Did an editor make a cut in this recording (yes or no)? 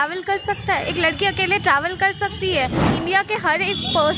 yes